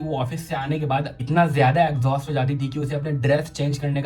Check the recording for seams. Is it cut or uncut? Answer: uncut